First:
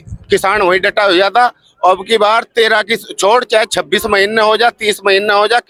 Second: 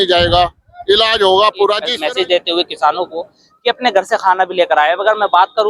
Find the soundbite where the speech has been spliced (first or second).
second